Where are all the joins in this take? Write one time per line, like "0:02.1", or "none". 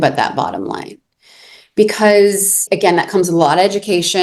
0:02.6